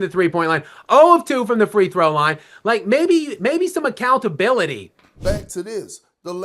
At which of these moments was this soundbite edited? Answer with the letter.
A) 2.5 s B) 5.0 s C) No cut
B